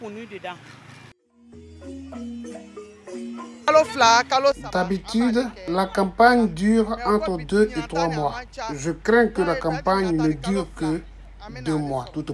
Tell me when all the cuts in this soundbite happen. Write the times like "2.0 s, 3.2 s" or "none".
none